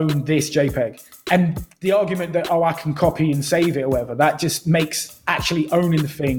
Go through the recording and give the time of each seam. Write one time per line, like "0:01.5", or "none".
0:01.1